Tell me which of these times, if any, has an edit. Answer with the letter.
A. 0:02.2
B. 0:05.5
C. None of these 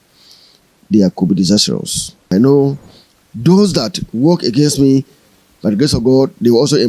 A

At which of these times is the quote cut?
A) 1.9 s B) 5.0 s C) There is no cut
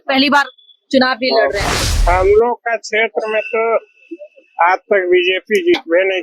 A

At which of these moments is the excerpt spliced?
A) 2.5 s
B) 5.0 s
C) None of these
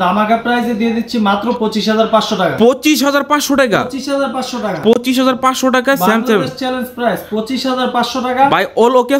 C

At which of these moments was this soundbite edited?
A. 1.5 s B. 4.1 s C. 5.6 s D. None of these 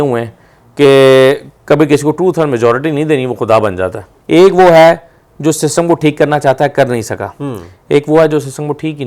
B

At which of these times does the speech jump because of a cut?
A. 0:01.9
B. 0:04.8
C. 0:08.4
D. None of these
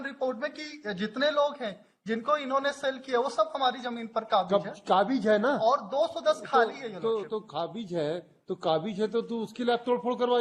D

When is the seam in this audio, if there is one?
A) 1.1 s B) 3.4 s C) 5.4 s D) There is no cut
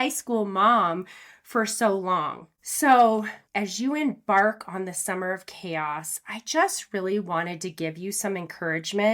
B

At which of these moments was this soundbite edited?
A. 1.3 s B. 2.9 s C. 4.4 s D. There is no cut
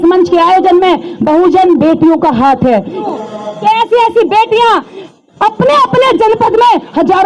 B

